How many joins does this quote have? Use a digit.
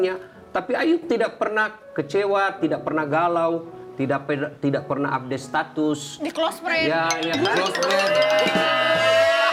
0